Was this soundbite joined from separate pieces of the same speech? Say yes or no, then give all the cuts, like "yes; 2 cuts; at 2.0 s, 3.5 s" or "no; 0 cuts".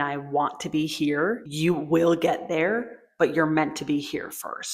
yes; 1 cut; at 1.5 s